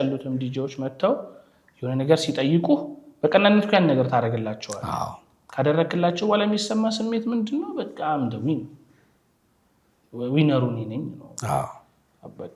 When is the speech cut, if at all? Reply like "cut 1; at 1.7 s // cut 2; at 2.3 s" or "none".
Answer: none